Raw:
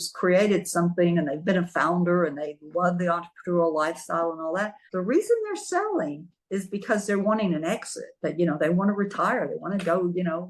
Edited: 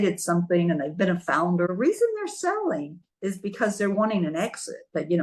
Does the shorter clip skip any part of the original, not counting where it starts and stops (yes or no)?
yes